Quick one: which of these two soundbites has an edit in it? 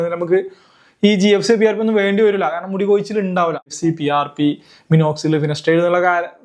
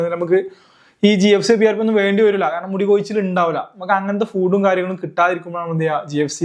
first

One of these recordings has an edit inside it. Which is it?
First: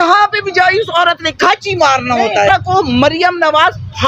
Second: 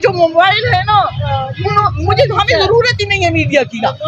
first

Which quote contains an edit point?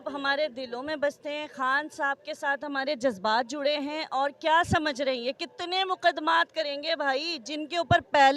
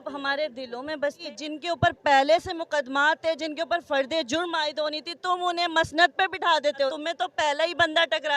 second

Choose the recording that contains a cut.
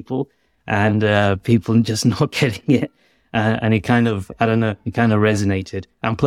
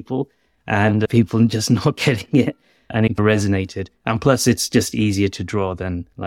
second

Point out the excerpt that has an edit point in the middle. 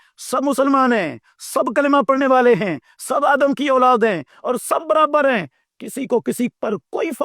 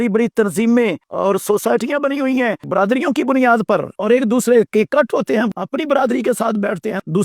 second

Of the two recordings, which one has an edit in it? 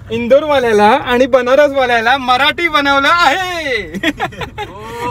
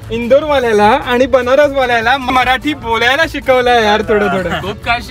second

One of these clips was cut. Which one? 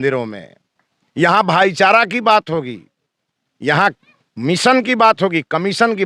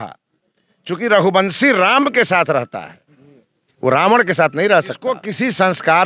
second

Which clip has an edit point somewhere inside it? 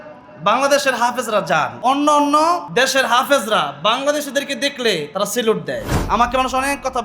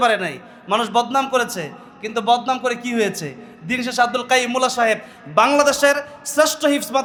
first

